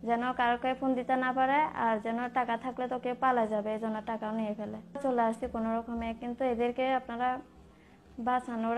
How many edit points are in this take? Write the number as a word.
one